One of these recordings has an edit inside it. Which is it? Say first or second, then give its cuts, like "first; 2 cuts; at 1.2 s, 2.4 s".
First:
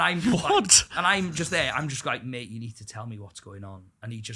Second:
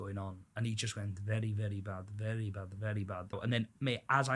second; 1 cut; at 3.4 s